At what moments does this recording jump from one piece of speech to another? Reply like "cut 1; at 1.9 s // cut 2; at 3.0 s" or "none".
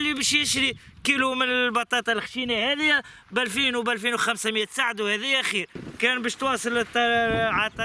cut 1; at 5.8 s